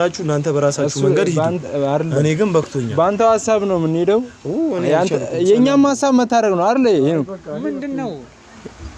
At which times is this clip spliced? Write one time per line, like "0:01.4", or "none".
none